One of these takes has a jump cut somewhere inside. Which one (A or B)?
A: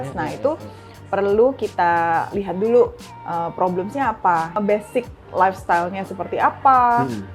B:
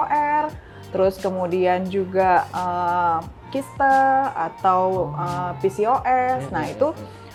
A